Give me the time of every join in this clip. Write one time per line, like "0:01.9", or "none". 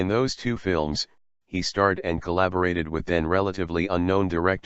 none